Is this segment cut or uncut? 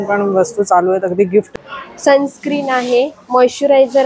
cut